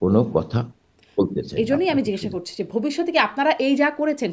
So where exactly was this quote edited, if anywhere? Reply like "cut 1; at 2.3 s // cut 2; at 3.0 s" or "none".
none